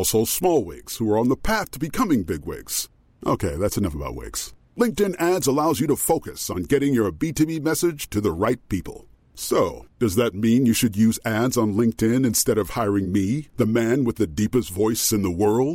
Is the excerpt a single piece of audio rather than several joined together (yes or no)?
yes